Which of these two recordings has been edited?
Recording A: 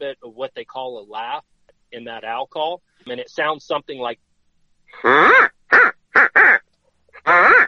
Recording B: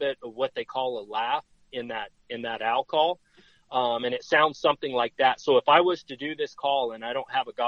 A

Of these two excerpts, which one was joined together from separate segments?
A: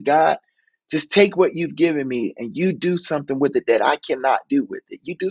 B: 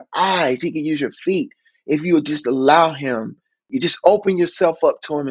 B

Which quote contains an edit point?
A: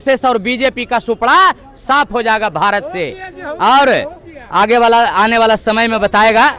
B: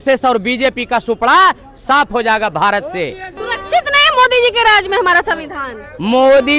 B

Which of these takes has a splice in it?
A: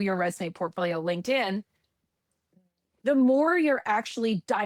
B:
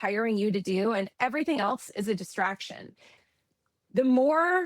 B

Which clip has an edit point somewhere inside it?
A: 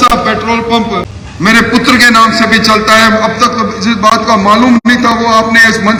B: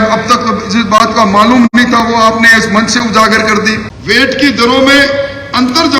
B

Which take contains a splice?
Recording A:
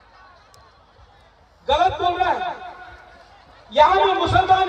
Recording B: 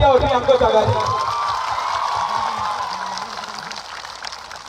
B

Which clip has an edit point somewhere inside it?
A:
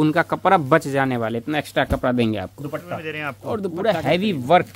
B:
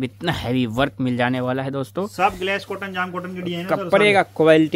A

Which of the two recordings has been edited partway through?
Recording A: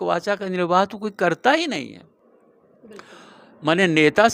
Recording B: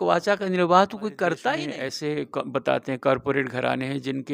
B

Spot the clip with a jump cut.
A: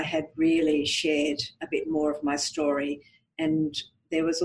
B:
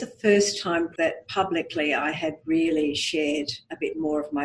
B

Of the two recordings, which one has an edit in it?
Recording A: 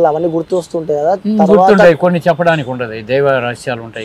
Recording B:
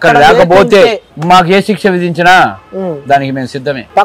B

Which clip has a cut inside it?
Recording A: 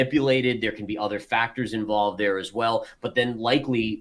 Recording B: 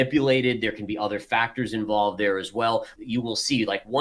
B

